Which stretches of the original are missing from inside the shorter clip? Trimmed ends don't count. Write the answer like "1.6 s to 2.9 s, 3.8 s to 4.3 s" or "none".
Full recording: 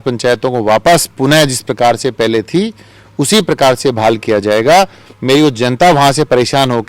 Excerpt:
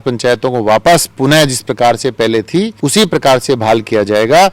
2.7 s to 3.1 s